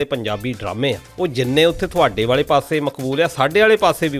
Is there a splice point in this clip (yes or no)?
yes